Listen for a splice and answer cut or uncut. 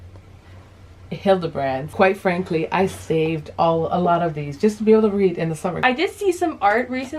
cut